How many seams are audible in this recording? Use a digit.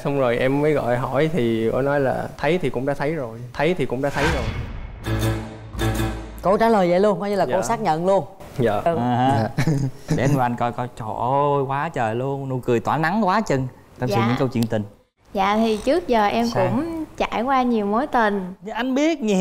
1